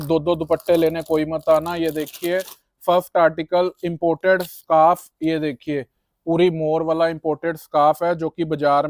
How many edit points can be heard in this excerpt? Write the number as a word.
zero